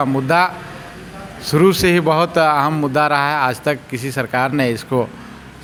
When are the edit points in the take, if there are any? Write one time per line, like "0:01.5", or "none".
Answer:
none